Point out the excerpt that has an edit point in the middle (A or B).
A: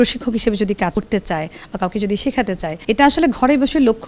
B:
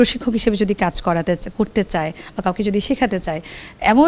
A